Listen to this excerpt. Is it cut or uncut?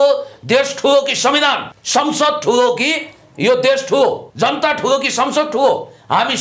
cut